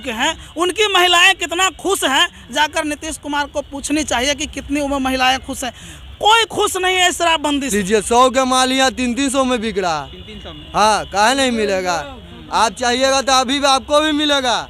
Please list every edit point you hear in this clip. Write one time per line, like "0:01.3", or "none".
0:07.7